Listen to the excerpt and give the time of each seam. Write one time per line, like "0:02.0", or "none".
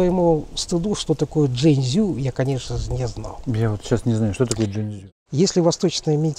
0:04.8